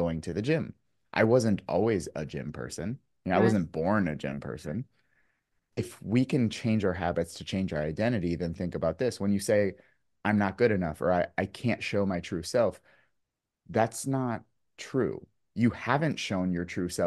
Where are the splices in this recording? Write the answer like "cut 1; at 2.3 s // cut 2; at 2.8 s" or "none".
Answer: cut 1; at 5.6 s